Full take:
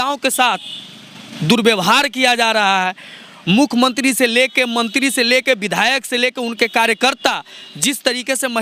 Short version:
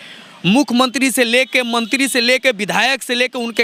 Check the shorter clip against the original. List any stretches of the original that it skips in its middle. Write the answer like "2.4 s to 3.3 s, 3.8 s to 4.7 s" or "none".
none